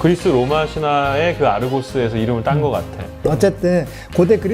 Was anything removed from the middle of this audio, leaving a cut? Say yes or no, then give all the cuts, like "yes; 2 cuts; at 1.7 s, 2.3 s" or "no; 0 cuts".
yes; 1 cut; at 3.2 s